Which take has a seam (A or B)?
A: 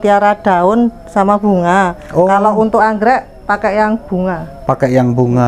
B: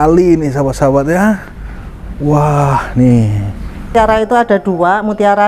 B